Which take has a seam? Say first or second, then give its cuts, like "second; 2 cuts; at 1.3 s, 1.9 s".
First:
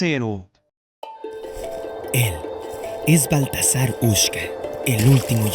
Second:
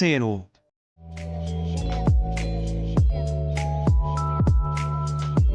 first; 1 cut; at 0.9 s